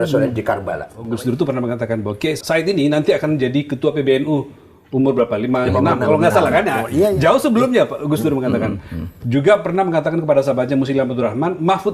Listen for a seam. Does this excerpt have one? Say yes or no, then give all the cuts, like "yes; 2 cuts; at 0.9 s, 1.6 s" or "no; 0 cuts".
yes; 2 cuts; at 0.9 s, 2.4 s